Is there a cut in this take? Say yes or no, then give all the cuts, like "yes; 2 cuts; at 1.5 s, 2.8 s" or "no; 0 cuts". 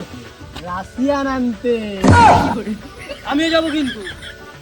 no; 0 cuts